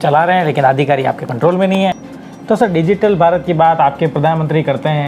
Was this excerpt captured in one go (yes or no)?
no